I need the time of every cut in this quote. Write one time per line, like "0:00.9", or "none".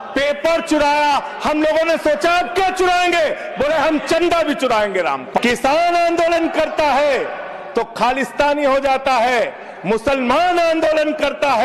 0:05.3